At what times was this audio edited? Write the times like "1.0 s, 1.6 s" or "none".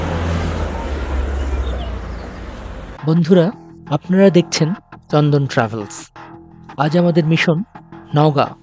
3.0 s